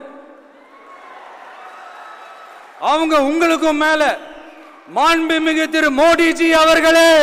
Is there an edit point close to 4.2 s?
no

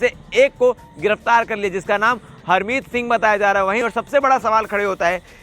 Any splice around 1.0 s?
no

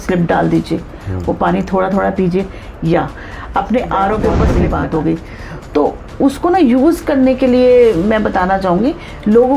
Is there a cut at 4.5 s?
yes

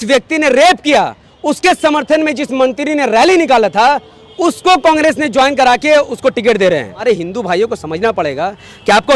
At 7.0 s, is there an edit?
yes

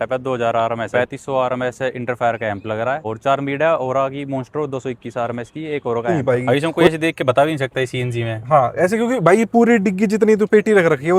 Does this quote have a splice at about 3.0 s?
yes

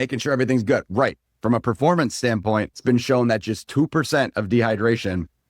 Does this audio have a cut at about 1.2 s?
yes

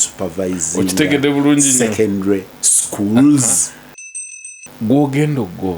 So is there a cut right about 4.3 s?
yes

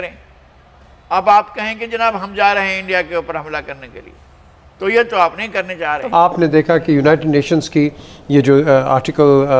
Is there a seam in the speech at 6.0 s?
yes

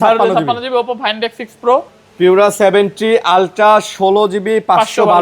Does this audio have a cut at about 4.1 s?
no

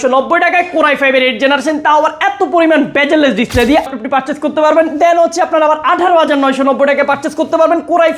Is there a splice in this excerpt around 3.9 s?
yes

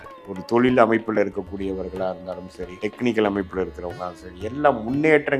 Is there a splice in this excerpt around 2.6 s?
yes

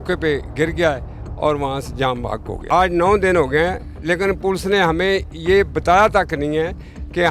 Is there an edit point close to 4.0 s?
no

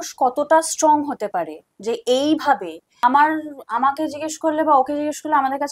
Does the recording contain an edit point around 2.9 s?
yes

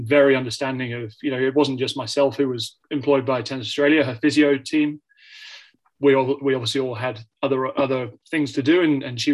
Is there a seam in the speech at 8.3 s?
no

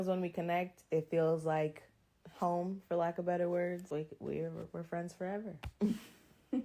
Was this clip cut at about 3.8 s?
yes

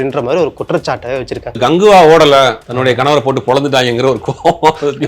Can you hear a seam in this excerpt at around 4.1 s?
no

